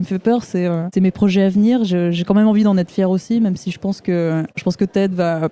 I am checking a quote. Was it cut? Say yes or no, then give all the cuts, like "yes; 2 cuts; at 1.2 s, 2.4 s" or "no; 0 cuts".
yes; 2 cuts; at 0.8 s, 4.6 s